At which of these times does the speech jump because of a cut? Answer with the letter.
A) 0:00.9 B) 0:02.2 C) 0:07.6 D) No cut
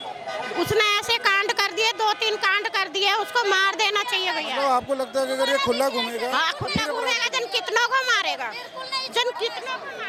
D